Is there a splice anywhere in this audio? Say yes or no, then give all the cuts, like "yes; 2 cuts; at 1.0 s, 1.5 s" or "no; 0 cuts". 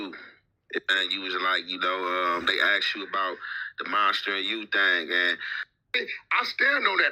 yes; 2 cuts; at 0.8 s, 6.0 s